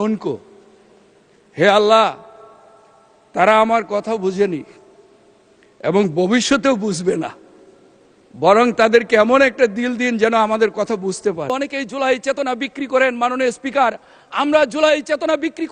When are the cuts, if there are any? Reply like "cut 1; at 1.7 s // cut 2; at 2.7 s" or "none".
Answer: cut 1; at 11.5 s